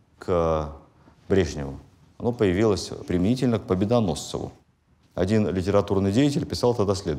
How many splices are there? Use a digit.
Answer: 0